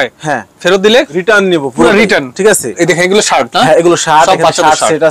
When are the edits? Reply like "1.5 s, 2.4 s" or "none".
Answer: 1.1 s, 2.8 s